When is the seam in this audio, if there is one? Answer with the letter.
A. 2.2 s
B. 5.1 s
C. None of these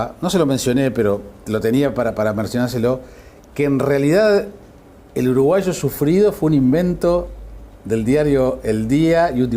A